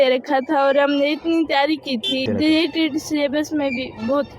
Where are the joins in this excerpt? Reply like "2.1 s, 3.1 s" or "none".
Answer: none

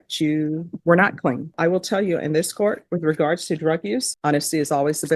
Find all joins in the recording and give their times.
1.5 s, 4.1 s

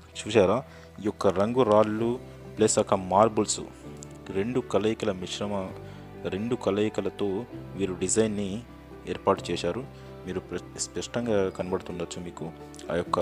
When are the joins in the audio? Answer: none

